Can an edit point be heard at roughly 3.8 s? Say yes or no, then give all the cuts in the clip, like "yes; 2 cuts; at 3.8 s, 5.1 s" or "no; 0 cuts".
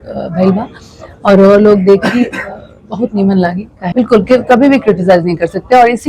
yes; 1 cut; at 3.8 s